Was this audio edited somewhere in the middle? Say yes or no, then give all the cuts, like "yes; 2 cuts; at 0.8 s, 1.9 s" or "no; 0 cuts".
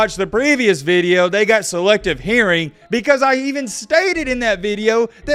no; 0 cuts